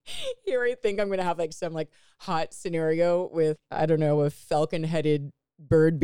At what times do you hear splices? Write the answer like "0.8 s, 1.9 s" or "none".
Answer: 3.6 s